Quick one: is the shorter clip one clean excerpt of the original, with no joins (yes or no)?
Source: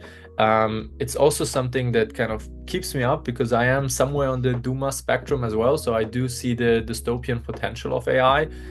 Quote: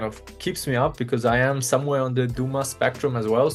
yes